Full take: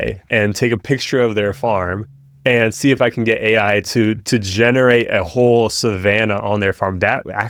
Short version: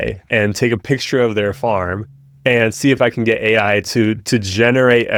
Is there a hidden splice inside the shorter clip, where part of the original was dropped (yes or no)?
no